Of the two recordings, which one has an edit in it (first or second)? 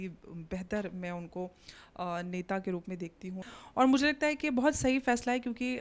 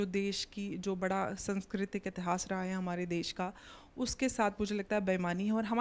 first